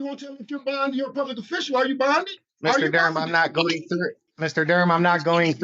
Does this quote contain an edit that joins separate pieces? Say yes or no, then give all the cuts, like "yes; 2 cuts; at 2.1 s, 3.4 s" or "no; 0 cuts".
yes; 2 cuts; at 2.4 s, 4.2 s